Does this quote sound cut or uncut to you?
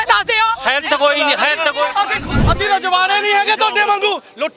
cut